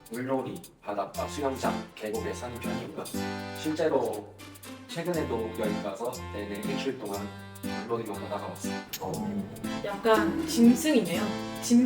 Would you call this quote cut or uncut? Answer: cut